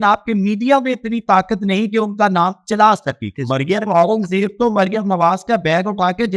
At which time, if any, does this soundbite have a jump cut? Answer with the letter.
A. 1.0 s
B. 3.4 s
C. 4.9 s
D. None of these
B